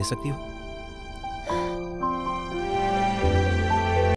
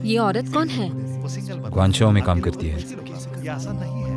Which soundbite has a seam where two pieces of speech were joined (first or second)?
first